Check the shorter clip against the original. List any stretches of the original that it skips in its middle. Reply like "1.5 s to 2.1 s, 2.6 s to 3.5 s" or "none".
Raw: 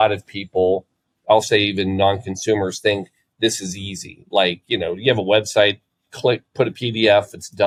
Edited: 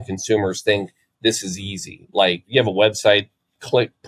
4.6 s to 5.0 s